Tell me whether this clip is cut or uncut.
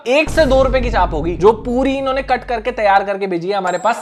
uncut